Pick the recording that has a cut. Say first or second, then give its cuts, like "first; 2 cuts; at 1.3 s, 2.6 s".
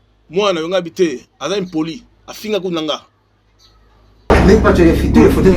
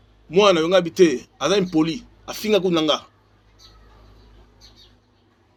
first; 1 cut; at 4.3 s